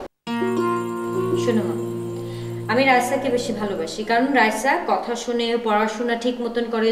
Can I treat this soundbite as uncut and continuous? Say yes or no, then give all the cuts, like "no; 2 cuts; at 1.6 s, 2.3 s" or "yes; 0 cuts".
yes; 0 cuts